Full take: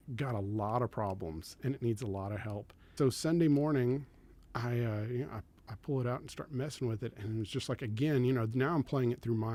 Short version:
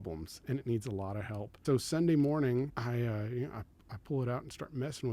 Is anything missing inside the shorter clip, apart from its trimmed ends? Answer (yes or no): yes